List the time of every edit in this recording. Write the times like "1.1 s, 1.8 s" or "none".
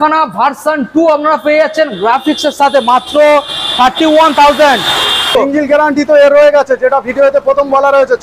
5.3 s